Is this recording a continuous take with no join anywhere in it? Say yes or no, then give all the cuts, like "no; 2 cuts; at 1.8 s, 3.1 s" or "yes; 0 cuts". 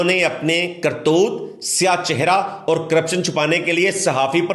yes; 0 cuts